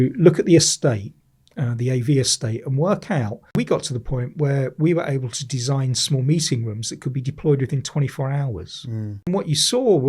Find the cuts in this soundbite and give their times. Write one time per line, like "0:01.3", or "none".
0:03.6
0:09.3